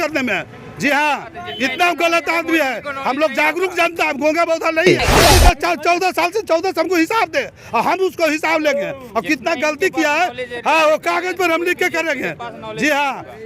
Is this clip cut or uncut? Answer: cut